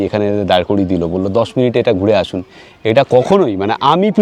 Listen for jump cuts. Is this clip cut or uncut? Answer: uncut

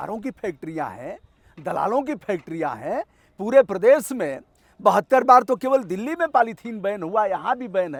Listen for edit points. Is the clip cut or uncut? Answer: uncut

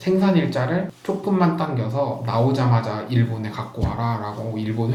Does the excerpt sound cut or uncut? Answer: uncut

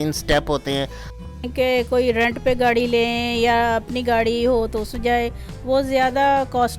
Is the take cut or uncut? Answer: cut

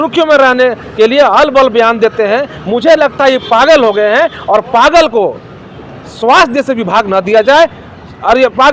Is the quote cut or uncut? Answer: uncut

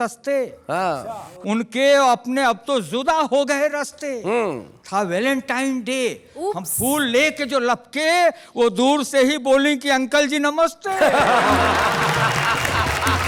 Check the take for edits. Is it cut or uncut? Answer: uncut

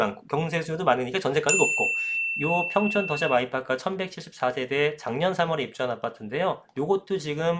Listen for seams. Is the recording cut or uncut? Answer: cut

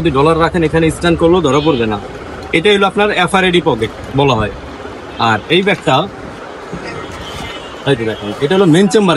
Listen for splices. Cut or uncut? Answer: uncut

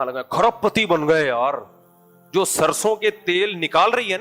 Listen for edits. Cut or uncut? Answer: uncut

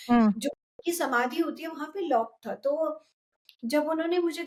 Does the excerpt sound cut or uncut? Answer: uncut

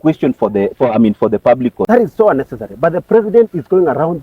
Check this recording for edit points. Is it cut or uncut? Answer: cut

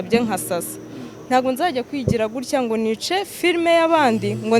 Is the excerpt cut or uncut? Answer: uncut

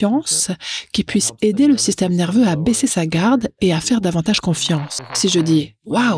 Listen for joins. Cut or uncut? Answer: cut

